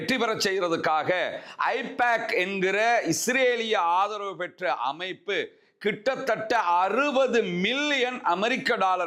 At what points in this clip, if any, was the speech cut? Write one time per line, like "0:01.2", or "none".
none